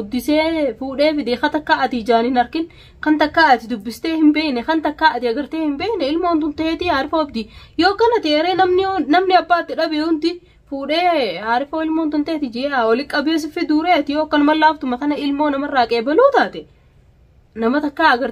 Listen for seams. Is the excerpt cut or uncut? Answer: uncut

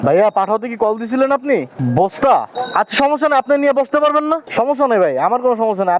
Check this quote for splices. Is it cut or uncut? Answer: cut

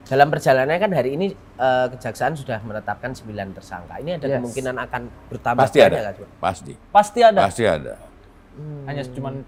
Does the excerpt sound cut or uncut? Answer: uncut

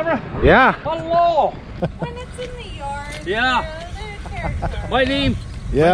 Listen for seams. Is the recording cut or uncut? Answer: cut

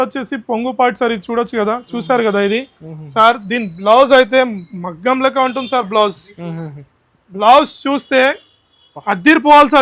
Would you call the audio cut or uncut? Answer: uncut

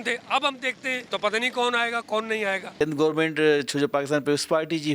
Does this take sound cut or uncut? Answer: cut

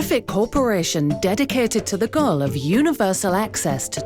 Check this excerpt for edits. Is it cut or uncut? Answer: uncut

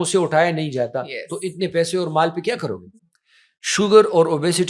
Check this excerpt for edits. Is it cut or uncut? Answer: cut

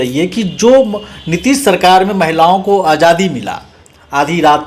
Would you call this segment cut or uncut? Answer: uncut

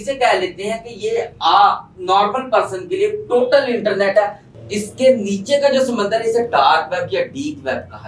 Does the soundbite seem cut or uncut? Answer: cut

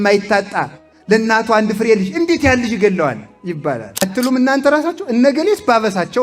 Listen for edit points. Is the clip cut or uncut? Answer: cut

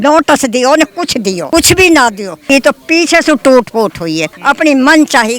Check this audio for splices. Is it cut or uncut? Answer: cut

